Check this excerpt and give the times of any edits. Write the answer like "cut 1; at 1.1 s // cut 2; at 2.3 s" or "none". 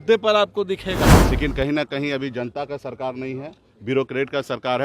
cut 1; at 1.2 s